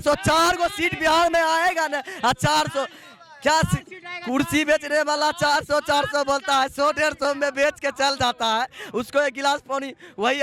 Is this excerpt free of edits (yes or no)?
yes